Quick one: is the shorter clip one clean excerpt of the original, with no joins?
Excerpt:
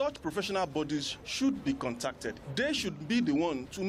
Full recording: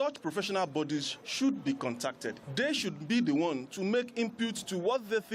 yes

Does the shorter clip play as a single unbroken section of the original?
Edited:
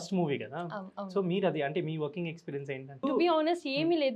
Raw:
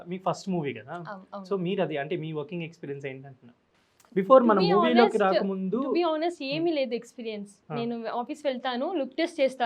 no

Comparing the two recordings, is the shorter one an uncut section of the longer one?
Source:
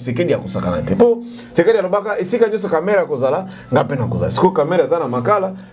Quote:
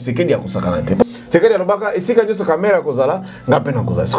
no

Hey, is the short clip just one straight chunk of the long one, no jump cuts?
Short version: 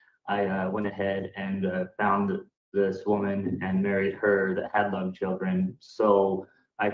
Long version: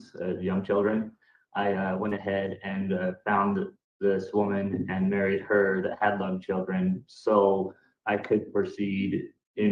yes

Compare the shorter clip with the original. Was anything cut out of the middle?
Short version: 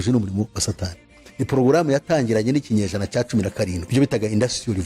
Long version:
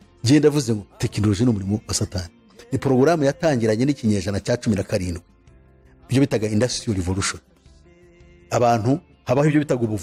yes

